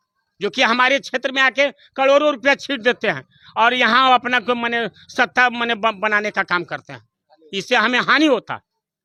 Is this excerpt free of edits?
yes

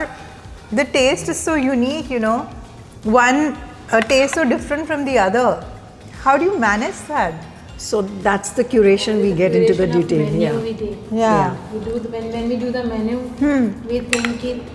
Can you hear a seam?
no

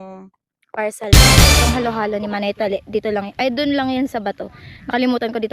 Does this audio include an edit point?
yes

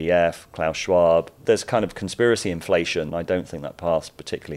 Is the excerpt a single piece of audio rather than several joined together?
no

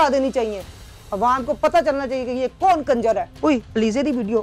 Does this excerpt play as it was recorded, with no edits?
no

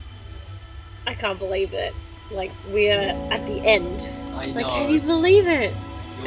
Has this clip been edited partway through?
no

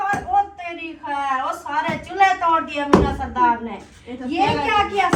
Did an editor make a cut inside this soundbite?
no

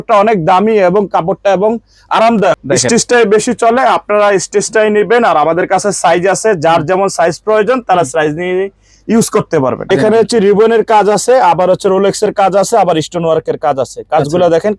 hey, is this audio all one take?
no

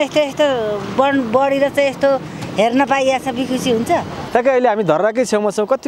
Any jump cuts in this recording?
yes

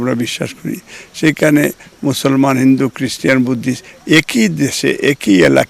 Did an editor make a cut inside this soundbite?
no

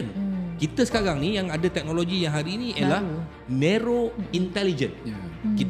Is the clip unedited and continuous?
yes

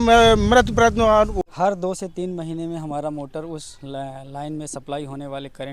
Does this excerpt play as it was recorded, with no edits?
no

